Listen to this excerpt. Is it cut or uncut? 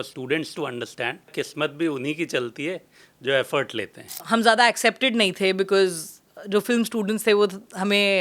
cut